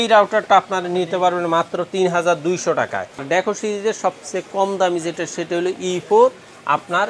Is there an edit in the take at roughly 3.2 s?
yes; 1 cut; at 3.2 s

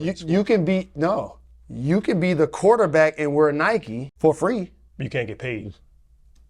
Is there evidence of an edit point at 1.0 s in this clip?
no; 1 cut; at 4.0 s

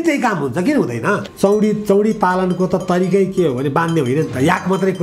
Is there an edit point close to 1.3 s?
yes; 1 cut; at 1.3 s

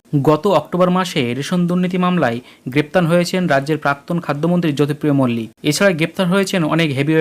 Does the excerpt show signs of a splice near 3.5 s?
no; 1 cut; at 5.5 s

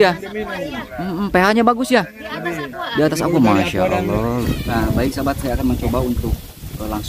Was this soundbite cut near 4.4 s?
yes; 1 cut; at 4.4 s

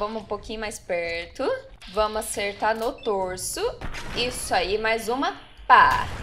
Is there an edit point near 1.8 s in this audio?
yes; 1 cut; at 1.8 s

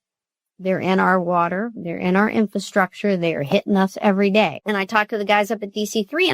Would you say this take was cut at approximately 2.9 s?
no; 1 cut; at 4.6 s

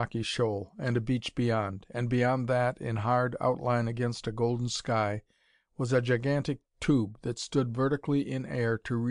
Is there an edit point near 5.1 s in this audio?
yes; 1 cut; at 5.1 s

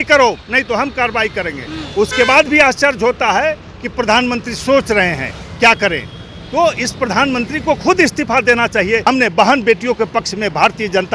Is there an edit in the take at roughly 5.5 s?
no; 1 cut; at 9.0 s

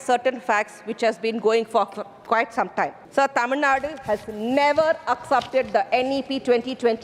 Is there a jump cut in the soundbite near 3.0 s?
yes; 1 cut; at 3.0 s

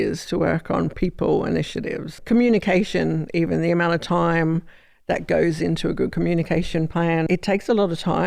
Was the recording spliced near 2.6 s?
no; 1 cut; at 7.3 s

